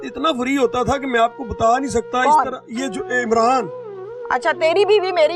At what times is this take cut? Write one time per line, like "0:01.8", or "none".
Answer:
none